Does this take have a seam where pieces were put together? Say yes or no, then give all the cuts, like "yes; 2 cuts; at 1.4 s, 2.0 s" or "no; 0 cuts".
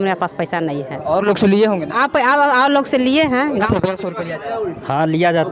yes; 1 cut; at 3.7 s